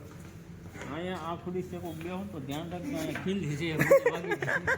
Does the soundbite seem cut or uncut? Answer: uncut